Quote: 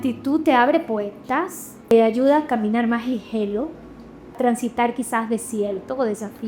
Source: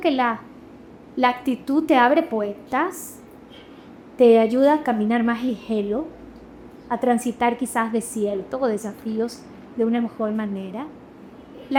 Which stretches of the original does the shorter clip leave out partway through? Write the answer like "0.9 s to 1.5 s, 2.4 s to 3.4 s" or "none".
3.3 s to 4.3 s, 6.7 s to 7.0 s